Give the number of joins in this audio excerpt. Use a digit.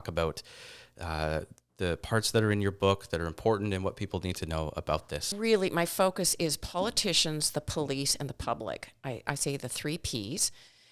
1